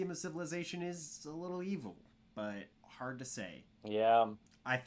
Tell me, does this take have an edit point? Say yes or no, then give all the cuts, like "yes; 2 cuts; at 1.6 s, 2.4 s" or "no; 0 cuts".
no; 0 cuts